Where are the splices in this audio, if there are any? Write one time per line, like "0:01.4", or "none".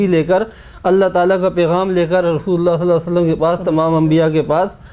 none